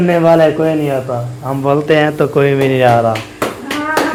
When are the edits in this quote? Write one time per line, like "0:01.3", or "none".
none